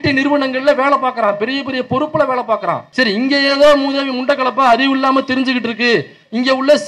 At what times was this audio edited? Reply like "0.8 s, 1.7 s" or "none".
2.8 s